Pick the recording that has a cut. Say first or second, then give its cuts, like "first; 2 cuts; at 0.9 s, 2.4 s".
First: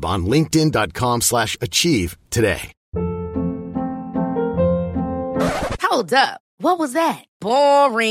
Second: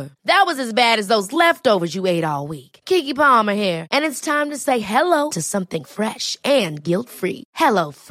first; 1 cut; at 2.8 s